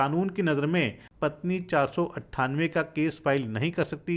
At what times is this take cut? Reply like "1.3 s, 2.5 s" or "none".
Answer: 1.0 s